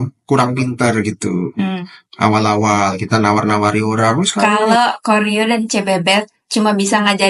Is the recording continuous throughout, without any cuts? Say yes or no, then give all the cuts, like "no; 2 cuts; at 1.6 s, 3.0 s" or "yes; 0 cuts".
no; 1 cut; at 4.4 s